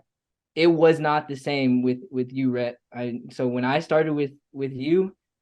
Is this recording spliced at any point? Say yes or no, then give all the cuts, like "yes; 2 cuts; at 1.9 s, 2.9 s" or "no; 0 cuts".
no; 0 cuts